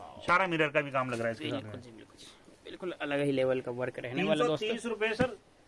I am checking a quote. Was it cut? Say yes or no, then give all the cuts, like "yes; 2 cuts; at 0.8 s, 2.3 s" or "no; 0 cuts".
no; 0 cuts